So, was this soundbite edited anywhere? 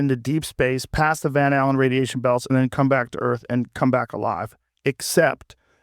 no; 0 cuts

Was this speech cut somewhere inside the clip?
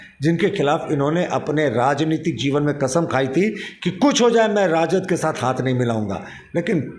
no; 0 cuts

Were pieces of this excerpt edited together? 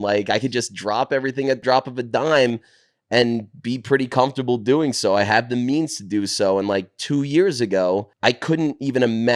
yes; 2 cuts; at 1.6 s, 8.1 s

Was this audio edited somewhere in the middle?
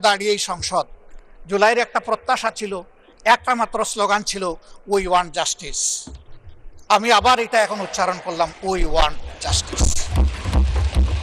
no; 0 cuts

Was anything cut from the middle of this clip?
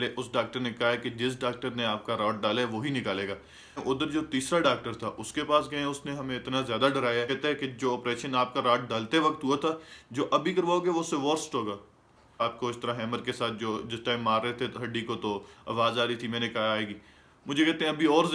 yes; 3 cuts; at 3.6 s, 7.3 s, 12.4 s

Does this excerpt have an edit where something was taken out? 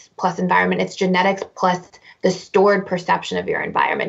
no; 0 cuts

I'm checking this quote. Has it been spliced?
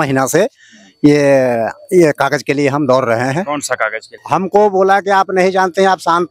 yes; 1 cut; at 4.2 s

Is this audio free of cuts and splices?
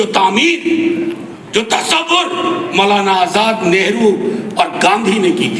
yes; 0 cuts

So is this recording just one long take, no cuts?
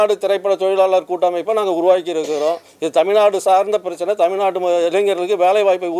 yes; 0 cuts

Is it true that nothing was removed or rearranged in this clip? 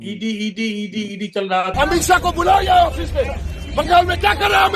no; 1 cut; at 1.7 s

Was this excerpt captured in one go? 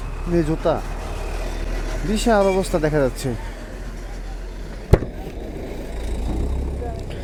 yes; 0 cuts

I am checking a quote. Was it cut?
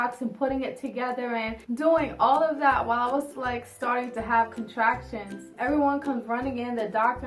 yes; 2 cuts; at 1.6 s, 5.4 s

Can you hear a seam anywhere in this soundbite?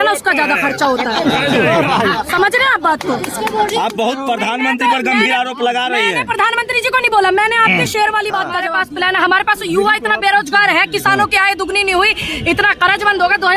yes; 1 cut; at 8.6 s

